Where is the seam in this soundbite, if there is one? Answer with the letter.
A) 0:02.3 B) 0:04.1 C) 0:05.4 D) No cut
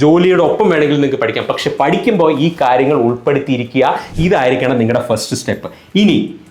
B